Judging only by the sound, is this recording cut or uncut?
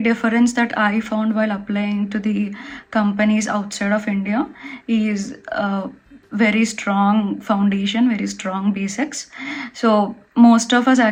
uncut